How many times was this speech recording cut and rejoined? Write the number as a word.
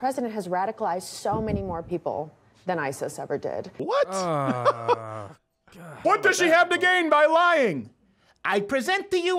two